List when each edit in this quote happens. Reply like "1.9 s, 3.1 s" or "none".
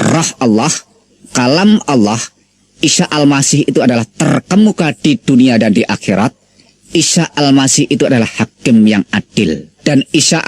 none